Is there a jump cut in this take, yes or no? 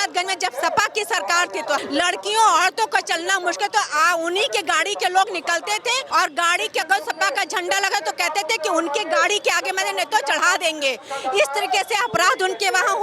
yes